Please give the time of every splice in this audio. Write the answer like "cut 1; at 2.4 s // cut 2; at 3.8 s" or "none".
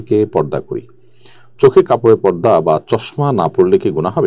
none